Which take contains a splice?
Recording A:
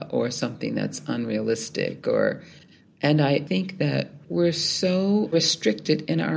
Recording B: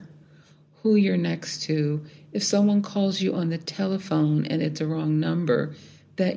A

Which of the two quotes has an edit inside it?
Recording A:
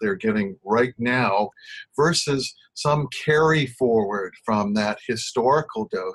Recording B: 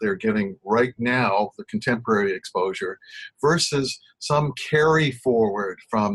A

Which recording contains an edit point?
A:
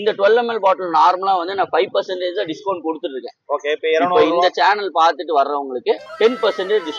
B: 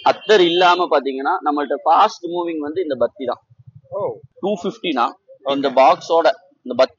B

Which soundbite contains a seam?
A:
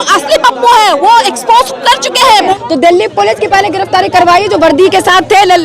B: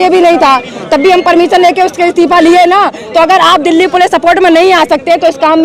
A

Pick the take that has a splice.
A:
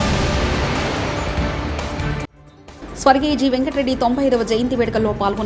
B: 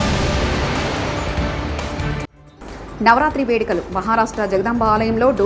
B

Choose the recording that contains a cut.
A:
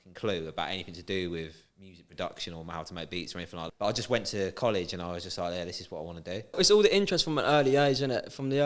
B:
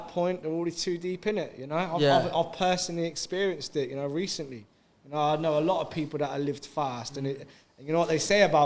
A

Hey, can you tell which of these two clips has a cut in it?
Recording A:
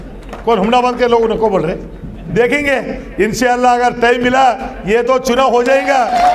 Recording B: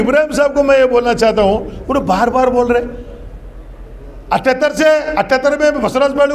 A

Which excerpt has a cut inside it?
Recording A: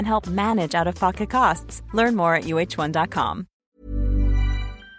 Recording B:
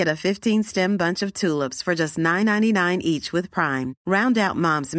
A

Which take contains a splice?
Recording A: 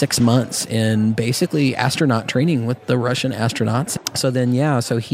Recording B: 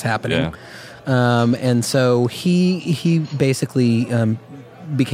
A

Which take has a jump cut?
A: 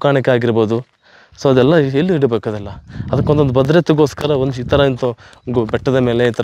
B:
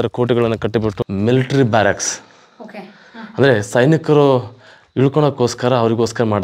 B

